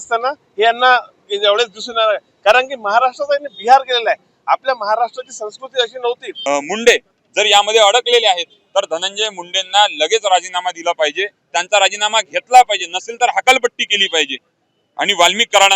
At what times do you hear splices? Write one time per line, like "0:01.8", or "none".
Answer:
0:06.3